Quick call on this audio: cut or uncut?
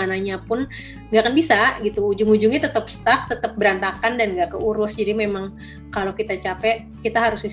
uncut